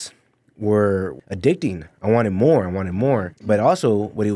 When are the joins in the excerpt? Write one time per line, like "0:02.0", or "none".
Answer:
0:01.1
0:03.3